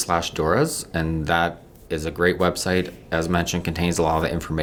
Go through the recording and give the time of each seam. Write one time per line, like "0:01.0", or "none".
none